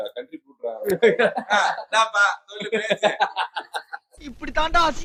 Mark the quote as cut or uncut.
uncut